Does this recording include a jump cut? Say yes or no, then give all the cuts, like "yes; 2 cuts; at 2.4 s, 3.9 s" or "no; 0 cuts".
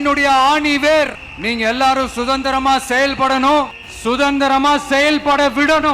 yes; 2 cuts; at 1.3 s, 3.8 s